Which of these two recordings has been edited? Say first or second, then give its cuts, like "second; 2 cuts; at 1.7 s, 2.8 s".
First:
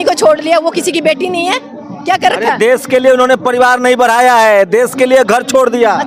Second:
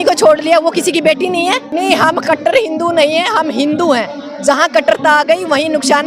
second; 1 cut; at 1.7 s